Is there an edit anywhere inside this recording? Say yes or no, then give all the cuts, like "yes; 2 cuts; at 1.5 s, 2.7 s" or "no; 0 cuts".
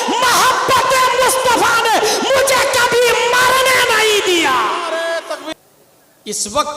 yes; 1 cut; at 5.5 s